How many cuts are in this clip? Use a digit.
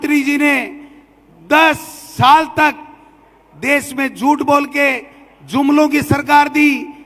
0